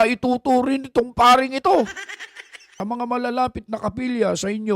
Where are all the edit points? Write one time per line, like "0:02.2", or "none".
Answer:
0:02.8